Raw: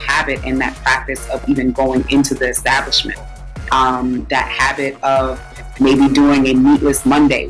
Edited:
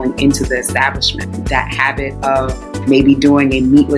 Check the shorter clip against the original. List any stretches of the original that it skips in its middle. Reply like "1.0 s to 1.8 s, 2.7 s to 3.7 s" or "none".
3.3 s to 4.2 s, 5.4 s to 5.6 s